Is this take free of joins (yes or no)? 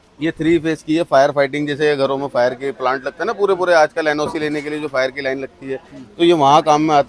yes